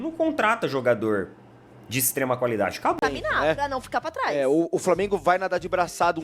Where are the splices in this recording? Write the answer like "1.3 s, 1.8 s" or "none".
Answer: 3.0 s